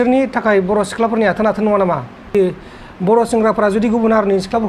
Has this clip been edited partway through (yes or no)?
yes